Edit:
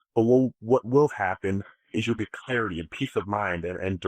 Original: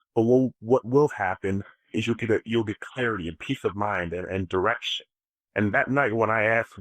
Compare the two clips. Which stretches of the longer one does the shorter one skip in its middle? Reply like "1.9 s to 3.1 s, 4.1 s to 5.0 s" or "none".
2.2 s to 2.7 s